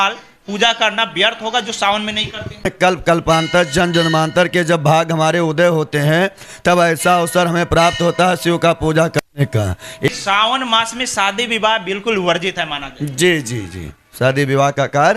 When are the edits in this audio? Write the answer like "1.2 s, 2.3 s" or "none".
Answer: 2.7 s, 10.1 s